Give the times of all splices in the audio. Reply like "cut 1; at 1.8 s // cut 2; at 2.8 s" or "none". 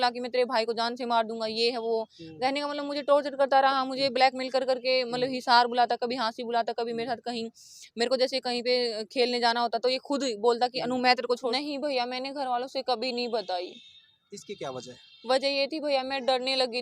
cut 1; at 11.5 s